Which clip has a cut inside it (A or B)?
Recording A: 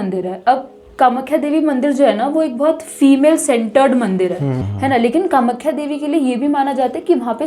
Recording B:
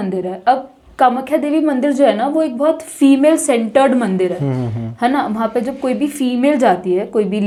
A